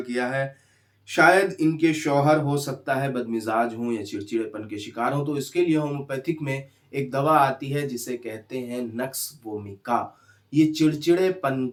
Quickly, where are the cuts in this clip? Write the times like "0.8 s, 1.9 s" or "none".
none